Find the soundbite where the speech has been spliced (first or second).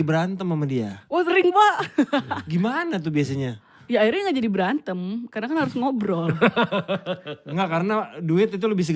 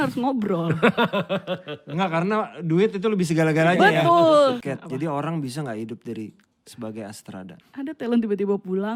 second